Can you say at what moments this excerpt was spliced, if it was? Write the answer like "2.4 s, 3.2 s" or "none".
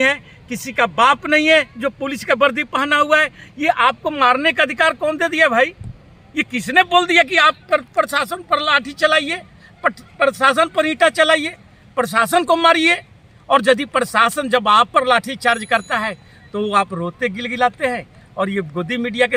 none